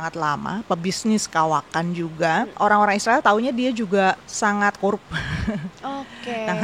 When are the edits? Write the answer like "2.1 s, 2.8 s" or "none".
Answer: 2.5 s, 4.3 s